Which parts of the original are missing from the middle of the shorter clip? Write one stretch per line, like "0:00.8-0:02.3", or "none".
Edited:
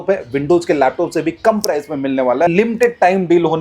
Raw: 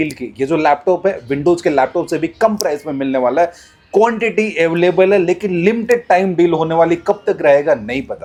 0:03.5-0:05.6